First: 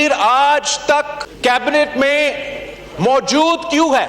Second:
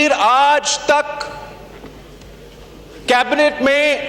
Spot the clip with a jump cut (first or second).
first